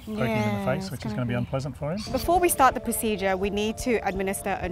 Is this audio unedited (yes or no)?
no